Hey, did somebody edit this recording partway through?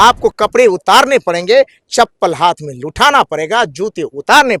no; 0 cuts

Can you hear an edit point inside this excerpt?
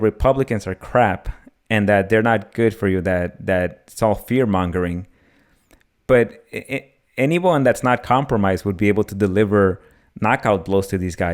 no; 0 cuts

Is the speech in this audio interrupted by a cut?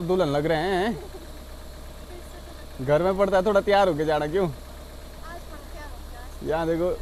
no; 0 cuts

